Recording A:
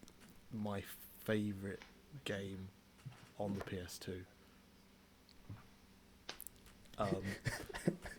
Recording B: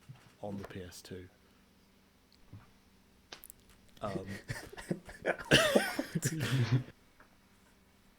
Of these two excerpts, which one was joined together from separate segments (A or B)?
B